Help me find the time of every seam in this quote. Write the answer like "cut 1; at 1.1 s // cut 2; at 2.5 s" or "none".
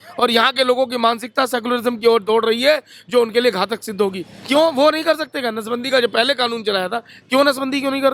cut 1; at 4.3 s